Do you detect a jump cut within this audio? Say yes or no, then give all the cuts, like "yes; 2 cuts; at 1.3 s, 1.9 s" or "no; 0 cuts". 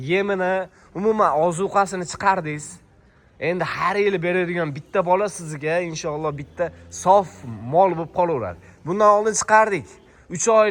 no; 0 cuts